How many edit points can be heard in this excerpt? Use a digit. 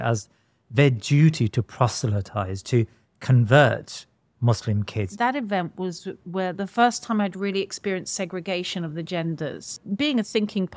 2